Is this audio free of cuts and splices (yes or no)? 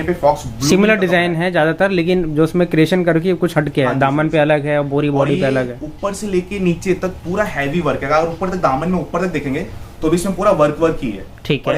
yes